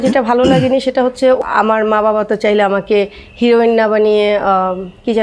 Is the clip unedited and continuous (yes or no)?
no